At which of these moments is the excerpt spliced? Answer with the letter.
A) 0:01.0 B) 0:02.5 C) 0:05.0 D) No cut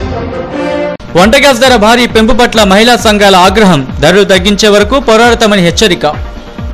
A